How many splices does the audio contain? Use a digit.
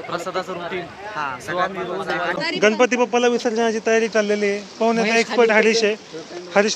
1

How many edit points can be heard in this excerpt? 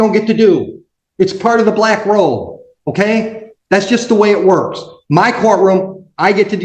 0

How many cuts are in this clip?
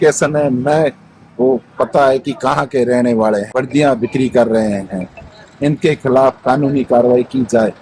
1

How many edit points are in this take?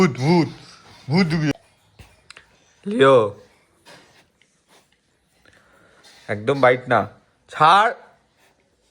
1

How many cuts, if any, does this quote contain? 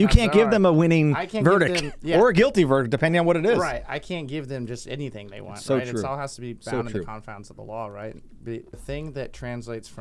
1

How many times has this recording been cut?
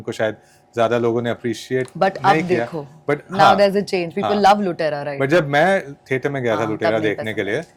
0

